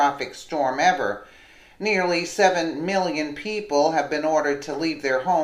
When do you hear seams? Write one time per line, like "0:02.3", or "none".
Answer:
0:01.4